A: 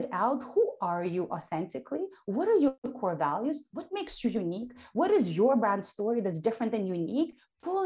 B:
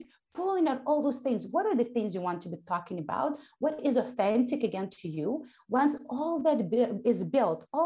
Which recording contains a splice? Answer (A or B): A